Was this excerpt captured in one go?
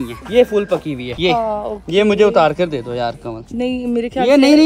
yes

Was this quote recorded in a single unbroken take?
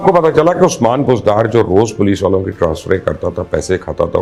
yes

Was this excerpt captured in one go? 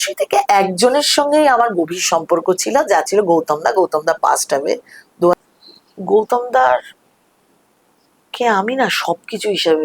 no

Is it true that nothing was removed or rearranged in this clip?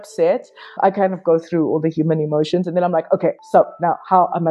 yes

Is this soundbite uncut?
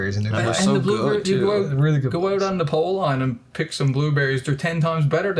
yes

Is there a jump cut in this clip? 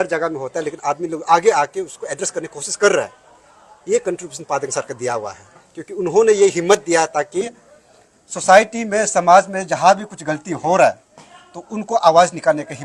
no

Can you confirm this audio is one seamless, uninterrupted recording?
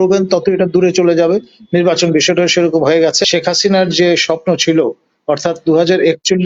no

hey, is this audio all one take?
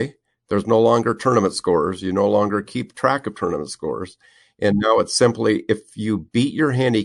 yes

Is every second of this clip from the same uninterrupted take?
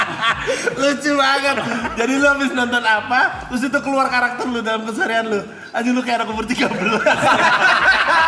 yes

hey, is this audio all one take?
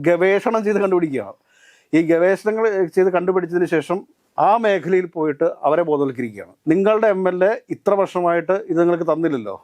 yes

